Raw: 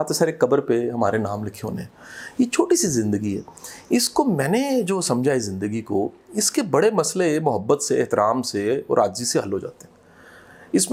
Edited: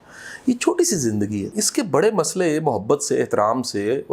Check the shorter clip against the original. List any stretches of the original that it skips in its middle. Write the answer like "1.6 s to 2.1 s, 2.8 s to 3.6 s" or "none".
3.5 s to 6.3 s